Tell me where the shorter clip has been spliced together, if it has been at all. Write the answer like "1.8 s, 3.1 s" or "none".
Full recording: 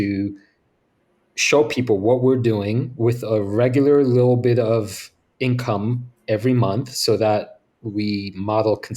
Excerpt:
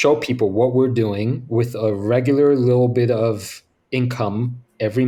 none